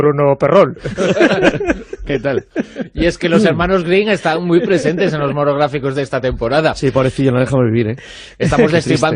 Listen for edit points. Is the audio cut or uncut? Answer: uncut